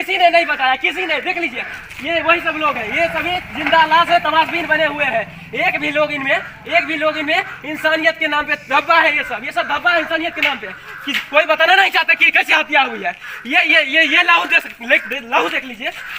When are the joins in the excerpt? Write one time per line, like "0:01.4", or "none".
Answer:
none